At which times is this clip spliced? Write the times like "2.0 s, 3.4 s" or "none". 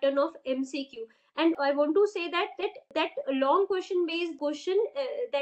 1.5 s, 2.9 s, 4.4 s